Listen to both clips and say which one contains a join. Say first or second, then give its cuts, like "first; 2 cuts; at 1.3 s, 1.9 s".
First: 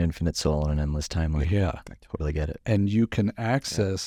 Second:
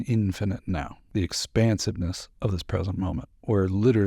second; 1 cut; at 1.0 s